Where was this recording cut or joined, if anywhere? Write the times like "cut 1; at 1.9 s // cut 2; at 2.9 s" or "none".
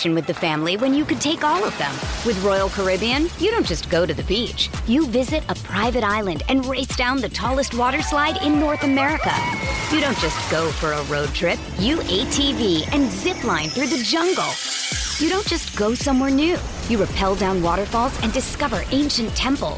none